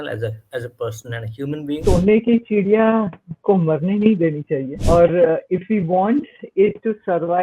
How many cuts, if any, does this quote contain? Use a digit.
2